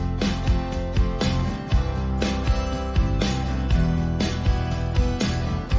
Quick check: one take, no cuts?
yes; 0 cuts

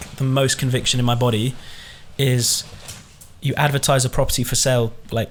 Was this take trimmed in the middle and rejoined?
no; 0 cuts

